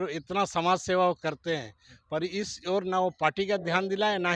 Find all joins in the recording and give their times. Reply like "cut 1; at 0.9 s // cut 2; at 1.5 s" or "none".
none

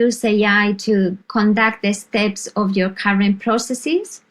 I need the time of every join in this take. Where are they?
cut 1; at 1.2 s

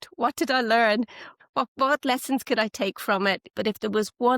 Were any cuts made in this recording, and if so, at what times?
cut 1; at 1.4 s // cut 2; at 3.5 s

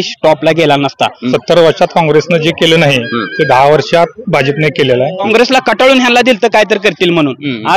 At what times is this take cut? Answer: cut 1; at 1.2 s // cut 2; at 5.3 s

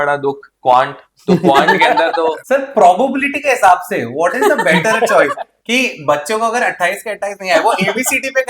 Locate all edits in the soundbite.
cut 1; at 2.4 s

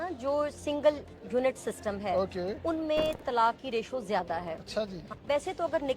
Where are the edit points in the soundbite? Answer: cut 1; at 5.1 s

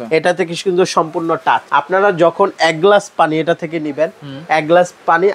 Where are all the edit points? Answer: cut 1; at 1.6 s

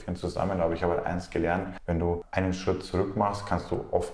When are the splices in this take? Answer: cut 1; at 2.1 s

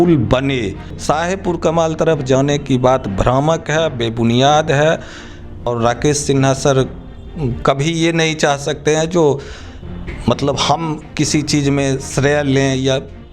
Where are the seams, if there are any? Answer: cut 1; at 0.9 s // cut 2; at 5.7 s

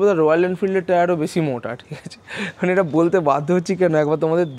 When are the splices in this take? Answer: none

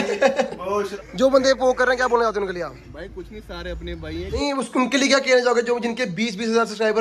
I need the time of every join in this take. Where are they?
cut 1; at 1.0 s // cut 2; at 4.2 s

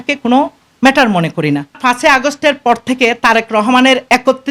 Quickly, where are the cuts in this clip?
cut 1; at 1.8 s

